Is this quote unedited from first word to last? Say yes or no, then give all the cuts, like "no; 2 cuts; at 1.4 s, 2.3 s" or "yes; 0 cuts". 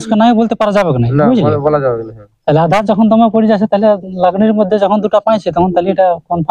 yes; 0 cuts